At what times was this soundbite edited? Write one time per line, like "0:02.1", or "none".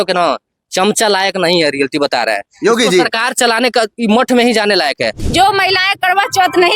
0:05.2

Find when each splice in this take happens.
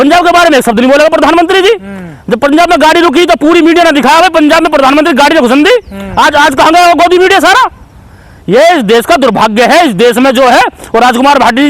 none

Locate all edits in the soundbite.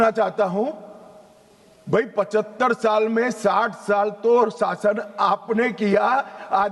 none

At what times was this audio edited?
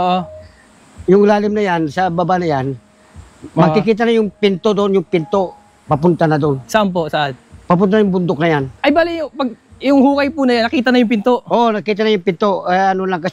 none

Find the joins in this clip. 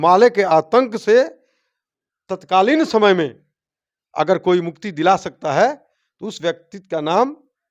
none

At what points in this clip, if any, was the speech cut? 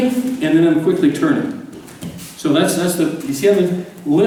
none

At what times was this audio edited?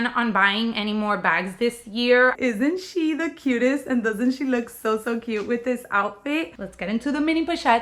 0:02.4
0:06.6

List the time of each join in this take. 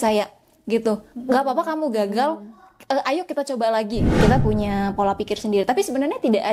0:04.0

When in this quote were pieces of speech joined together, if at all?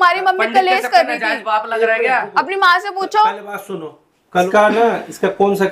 0:04.3

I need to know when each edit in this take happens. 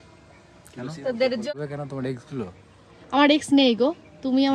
0:01.5

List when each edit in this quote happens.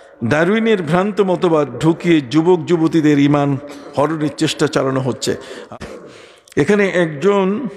0:05.7

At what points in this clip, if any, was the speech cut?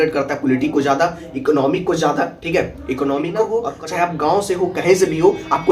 0:03.7

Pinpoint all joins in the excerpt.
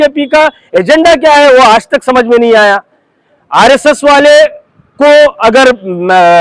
none

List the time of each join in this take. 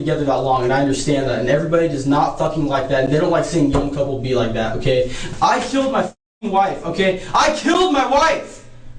0:05.2

